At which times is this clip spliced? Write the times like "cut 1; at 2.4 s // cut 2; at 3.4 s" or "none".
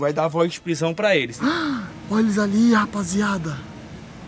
cut 1; at 1.3 s